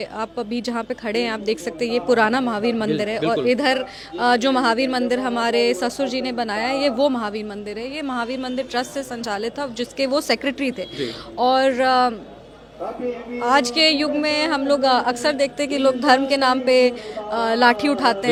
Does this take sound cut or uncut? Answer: uncut